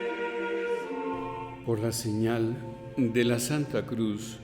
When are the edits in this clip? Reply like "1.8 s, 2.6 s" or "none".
1.5 s